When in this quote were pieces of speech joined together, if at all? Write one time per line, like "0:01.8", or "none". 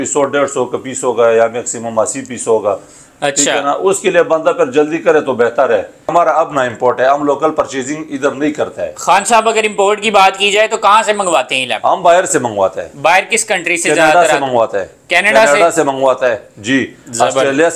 0:06.1